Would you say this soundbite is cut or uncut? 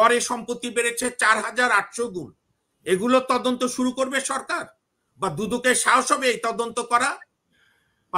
uncut